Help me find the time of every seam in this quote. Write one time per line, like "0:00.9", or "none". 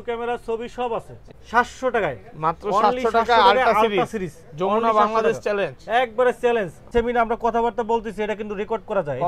0:01.2
0:06.8

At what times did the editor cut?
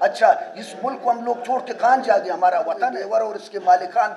0:03.1

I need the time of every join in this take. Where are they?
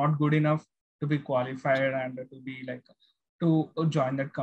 none

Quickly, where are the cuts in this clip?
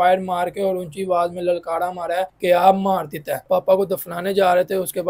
0:02.3
0:03.4

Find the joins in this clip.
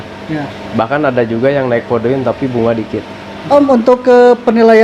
0:03.3

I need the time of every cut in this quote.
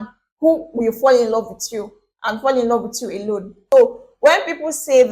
0:03.6

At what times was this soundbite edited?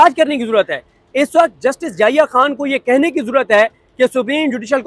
none

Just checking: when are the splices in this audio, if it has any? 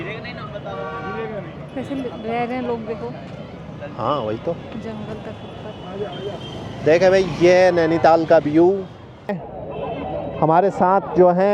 0:09.3

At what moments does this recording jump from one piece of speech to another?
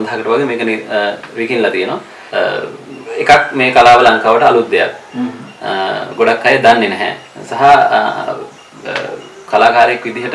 0:02.1

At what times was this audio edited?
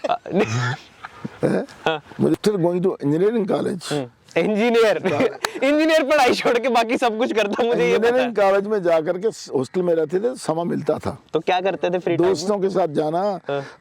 0:02.4

